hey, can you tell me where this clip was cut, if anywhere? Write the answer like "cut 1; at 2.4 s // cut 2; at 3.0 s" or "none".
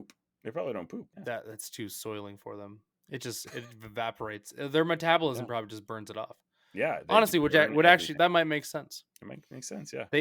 cut 1; at 1.1 s // cut 2; at 8.1 s